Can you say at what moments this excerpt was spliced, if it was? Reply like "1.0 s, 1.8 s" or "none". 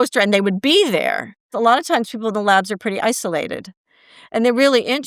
1.5 s